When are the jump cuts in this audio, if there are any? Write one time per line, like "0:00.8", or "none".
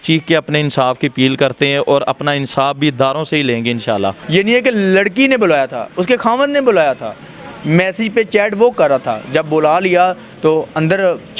0:04.2